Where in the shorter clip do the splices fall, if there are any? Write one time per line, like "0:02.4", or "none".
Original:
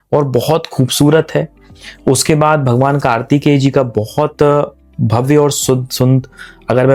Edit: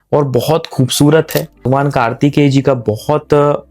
0:01.7